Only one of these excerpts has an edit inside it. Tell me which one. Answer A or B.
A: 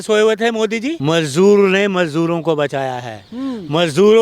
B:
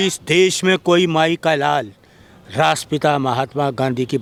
A